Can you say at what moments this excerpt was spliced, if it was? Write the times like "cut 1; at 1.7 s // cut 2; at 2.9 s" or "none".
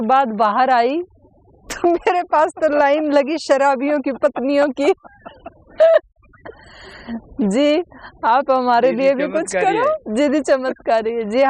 none